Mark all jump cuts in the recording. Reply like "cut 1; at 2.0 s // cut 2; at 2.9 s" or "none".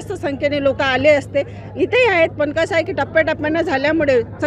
none